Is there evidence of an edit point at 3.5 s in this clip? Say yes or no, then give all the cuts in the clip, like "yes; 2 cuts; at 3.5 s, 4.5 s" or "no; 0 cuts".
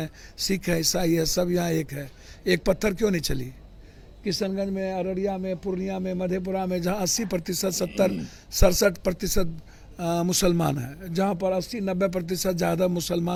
no; 0 cuts